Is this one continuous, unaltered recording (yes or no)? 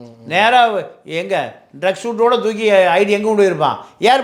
yes